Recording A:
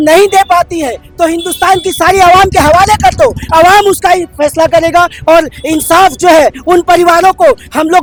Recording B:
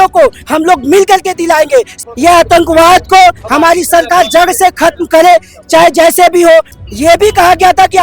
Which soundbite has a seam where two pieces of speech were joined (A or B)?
B